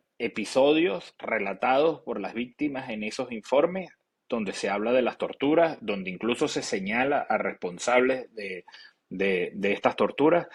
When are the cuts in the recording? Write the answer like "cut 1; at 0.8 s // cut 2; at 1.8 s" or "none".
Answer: none